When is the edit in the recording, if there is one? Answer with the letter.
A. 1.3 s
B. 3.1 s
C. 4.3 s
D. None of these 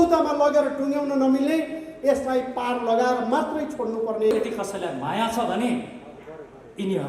C